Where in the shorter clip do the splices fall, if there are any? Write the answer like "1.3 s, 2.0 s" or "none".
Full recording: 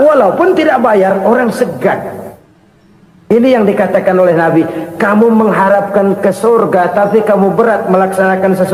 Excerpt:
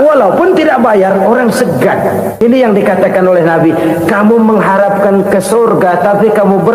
2.4 s